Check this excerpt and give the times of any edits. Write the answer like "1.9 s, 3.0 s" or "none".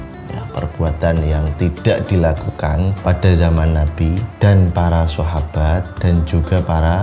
3.0 s, 4.3 s, 5.9 s